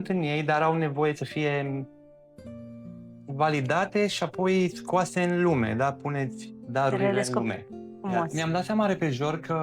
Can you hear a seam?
yes; 1 cut; at 8.3 s

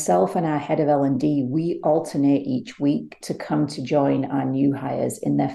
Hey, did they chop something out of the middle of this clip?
no; 0 cuts

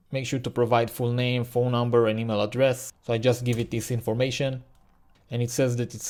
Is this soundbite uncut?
yes; 0 cuts

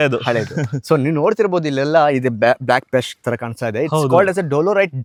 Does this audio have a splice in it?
no; 0 cuts

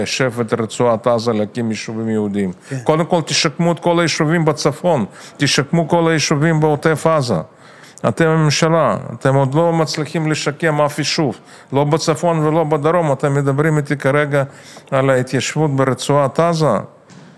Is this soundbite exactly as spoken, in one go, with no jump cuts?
yes; 0 cuts

